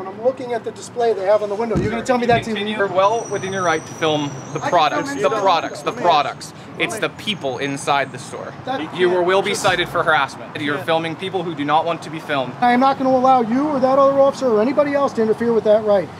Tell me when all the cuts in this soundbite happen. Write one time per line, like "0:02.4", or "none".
0:02.8
0:08.9
0:10.6
0:12.6

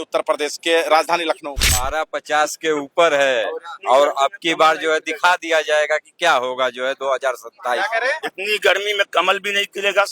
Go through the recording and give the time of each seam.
0:01.7

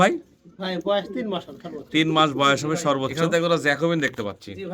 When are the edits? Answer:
0:03.2

